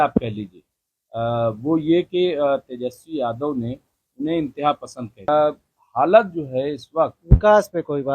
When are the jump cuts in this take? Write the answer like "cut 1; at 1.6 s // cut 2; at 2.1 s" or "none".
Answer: cut 1; at 5.3 s